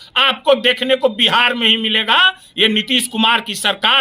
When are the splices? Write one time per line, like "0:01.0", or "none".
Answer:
none